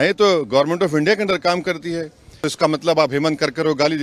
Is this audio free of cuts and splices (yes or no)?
no